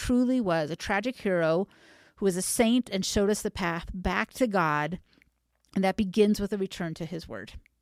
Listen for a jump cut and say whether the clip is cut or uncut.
uncut